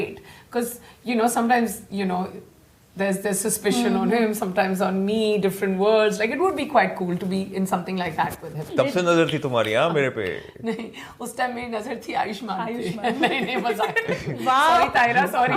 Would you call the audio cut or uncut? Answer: cut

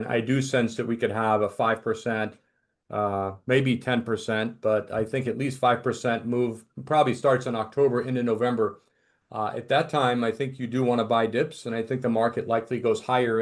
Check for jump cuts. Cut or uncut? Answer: uncut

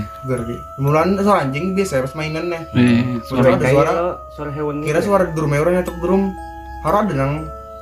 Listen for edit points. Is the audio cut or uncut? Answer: uncut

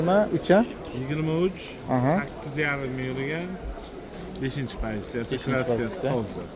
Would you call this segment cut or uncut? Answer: uncut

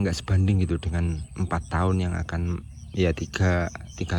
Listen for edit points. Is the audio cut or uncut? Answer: uncut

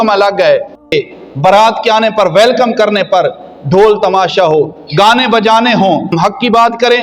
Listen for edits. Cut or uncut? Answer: cut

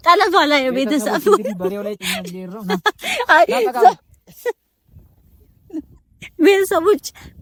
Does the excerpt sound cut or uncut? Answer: uncut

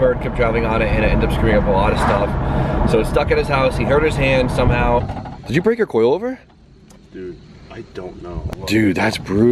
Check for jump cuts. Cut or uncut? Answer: uncut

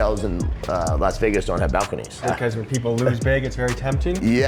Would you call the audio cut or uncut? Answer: uncut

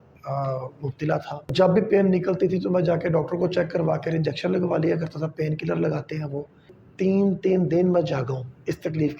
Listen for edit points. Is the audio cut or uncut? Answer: cut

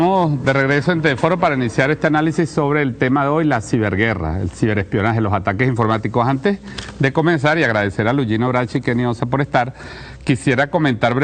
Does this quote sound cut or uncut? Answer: uncut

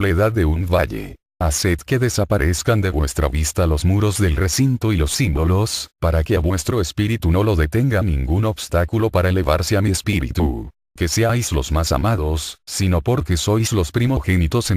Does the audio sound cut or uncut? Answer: uncut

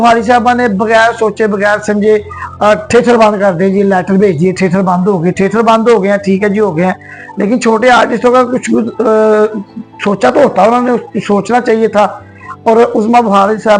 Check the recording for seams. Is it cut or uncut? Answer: uncut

